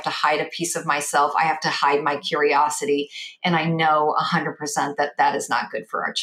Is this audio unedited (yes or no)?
yes